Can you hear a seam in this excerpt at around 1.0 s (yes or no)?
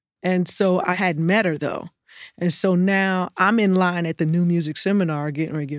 yes